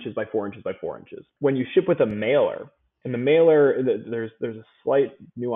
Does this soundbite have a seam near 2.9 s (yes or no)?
no